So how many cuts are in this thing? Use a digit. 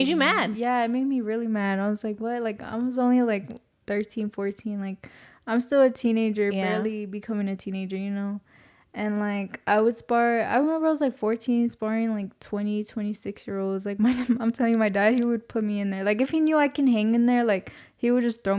0